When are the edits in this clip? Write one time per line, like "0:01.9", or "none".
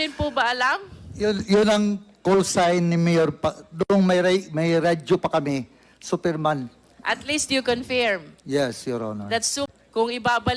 0:09.7